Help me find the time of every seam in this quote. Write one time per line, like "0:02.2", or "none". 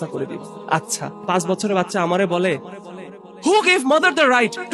0:01.3

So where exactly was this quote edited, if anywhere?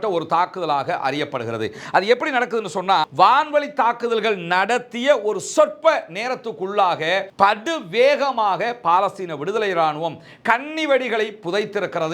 0:03.1

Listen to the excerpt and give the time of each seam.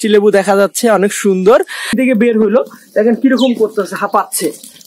0:02.0

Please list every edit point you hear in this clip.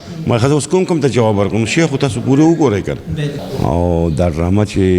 0:03.4

